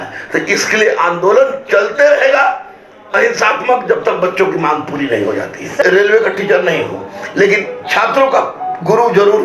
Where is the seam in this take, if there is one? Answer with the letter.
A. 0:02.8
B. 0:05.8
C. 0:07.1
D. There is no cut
B